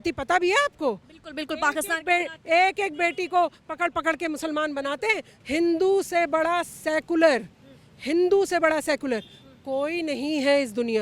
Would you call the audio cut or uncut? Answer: cut